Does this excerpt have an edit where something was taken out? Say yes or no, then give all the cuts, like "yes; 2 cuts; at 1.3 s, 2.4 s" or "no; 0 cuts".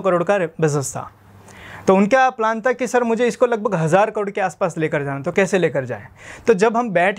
no; 0 cuts